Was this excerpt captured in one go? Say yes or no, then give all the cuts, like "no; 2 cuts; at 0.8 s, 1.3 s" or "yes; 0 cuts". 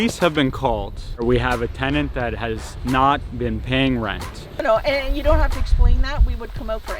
no; 2 cuts; at 1.2 s, 4.6 s